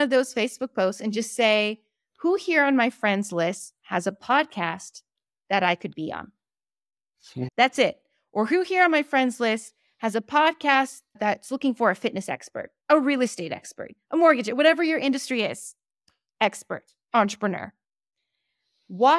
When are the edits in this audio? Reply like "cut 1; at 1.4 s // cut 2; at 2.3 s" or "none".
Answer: none